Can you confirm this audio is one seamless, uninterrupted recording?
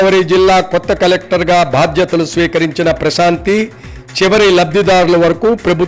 yes; 0 cuts

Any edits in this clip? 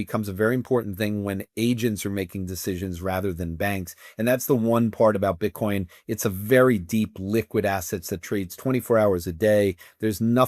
no; 0 cuts

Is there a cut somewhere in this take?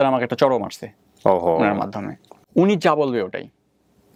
no; 0 cuts

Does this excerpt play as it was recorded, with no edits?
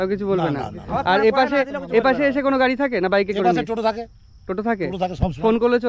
yes; 0 cuts

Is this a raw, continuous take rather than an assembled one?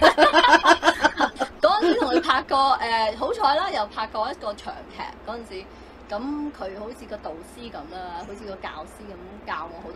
yes; 0 cuts

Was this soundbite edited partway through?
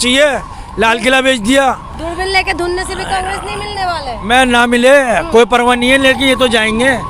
no; 0 cuts

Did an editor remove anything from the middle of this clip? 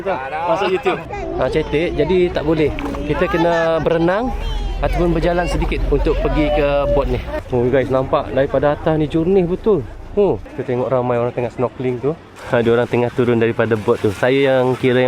yes; 4 cuts; at 1.0 s, 7.3 s, 10.5 s, 12.3 s

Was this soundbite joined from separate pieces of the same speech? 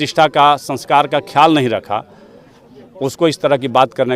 no; 0 cuts

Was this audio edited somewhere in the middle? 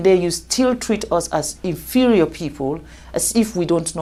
no; 0 cuts

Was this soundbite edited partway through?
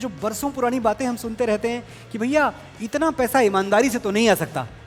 no; 0 cuts

